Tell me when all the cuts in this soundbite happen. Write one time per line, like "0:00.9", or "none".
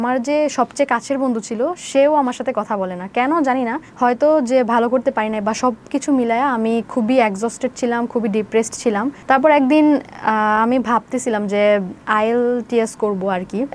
none